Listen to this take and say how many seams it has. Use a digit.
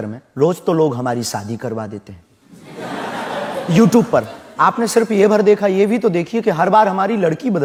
0